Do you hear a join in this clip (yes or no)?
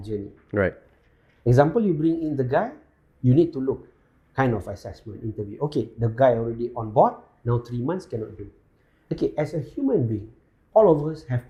no